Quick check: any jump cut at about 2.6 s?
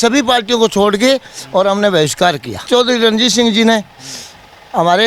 yes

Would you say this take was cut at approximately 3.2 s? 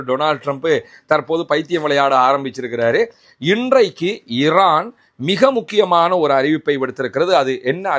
yes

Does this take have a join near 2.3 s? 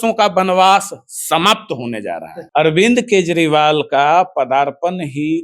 yes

